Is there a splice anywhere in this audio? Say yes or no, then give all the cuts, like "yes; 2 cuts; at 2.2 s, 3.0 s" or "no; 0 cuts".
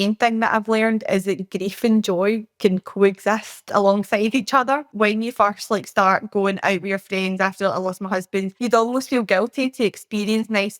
yes; 2 cuts; at 4.9 s, 8.5 s